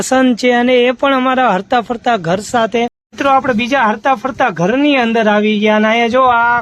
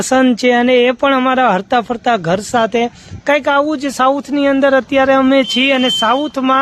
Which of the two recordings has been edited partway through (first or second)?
first